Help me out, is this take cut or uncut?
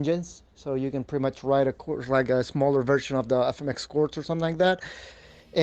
uncut